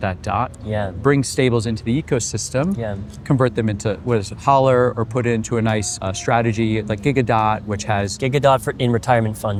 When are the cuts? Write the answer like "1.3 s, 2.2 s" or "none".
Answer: none